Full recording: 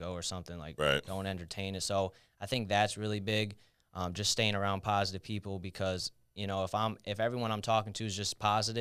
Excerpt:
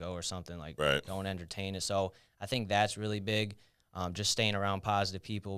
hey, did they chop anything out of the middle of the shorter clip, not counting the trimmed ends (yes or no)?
no